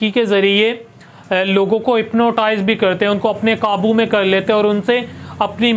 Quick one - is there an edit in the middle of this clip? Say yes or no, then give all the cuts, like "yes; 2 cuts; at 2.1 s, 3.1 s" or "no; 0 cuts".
no; 0 cuts